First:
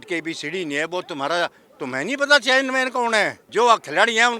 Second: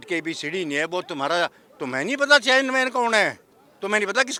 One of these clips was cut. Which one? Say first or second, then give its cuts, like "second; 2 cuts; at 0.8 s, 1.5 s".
first; 1 cut; at 3.4 s